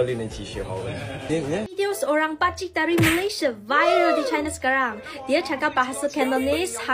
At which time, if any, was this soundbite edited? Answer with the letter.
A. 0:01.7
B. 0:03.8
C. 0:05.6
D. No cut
A